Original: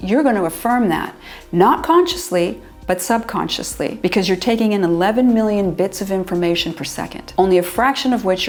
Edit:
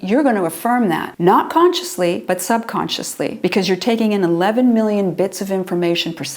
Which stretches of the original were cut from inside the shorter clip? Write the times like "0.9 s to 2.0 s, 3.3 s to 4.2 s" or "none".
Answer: 1.1 s to 1.4 s, 2.5 s to 2.8 s